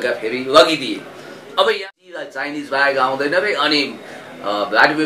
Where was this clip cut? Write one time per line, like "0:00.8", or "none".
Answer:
0:01.8